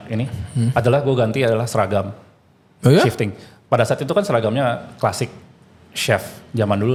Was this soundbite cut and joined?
no; 0 cuts

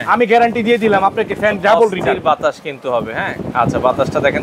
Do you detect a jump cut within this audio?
no; 0 cuts

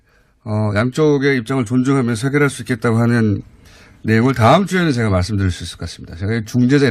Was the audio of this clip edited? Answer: yes; 1 cut; at 4.5 s

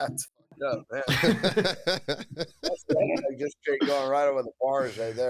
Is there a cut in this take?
no; 0 cuts

